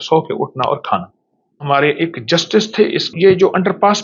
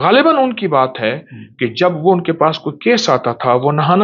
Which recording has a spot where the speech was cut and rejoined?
first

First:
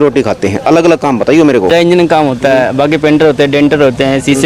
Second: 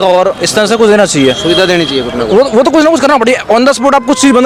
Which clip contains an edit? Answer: first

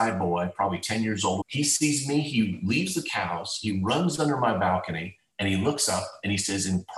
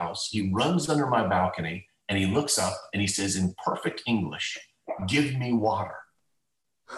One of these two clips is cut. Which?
first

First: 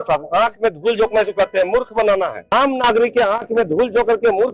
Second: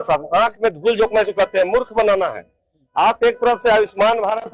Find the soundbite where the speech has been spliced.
first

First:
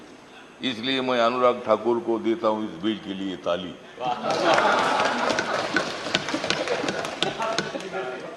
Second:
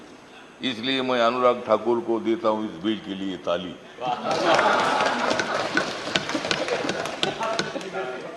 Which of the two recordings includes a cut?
second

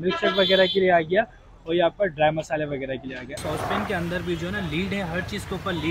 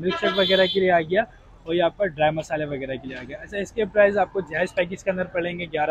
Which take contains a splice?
first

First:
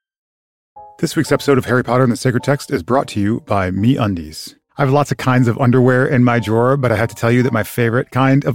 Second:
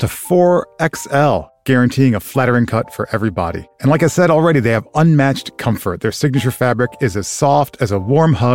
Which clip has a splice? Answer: first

